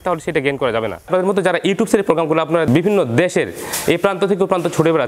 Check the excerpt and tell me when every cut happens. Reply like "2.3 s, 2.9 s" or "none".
1.1 s